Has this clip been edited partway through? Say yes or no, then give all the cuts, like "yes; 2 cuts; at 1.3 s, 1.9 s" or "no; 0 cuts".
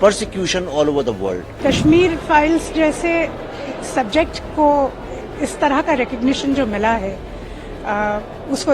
yes; 1 cut; at 1.5 s